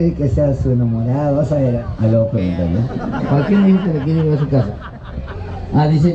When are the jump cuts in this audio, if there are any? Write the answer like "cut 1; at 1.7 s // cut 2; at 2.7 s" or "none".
none